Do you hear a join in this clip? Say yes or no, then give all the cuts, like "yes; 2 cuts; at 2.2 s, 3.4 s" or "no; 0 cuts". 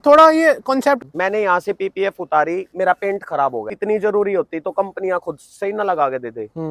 yes; 2 cuts; at 1.0 s, 3.7 s